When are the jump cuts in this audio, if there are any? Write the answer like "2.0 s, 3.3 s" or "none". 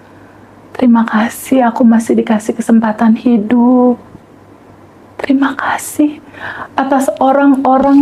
none